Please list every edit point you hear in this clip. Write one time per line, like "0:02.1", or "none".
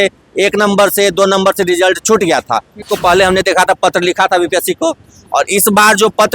0:02.8